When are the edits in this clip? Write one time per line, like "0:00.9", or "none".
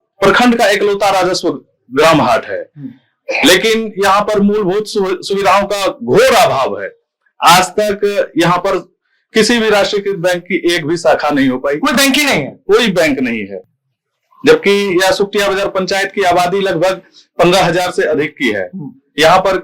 none